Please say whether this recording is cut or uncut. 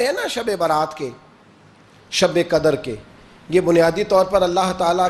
uncut